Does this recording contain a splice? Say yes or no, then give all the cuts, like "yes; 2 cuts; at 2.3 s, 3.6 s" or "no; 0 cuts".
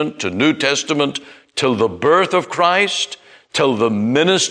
no; 0 cuts